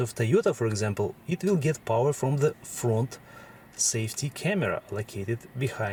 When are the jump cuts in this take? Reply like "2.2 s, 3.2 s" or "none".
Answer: none